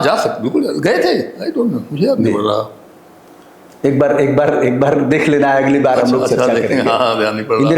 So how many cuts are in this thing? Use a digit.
0